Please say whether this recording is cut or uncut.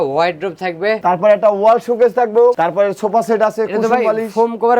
cut